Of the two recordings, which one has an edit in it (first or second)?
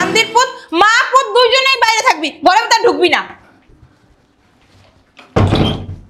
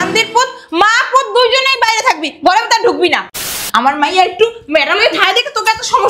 second